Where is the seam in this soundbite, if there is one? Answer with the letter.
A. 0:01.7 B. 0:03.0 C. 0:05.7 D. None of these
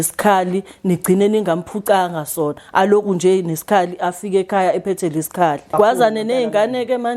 C